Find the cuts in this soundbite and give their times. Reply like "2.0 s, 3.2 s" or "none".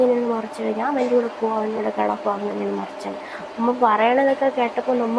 none

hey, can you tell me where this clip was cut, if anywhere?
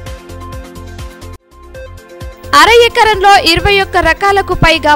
1.2 s

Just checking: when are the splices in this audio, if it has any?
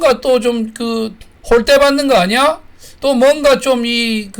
1.3 s

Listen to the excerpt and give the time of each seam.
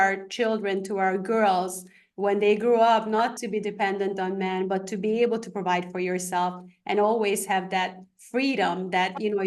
none

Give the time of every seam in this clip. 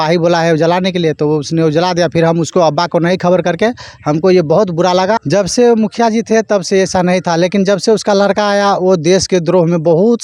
5.2 s

